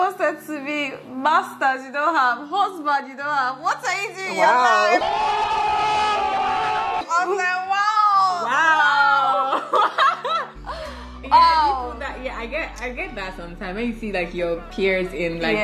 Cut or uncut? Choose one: uncut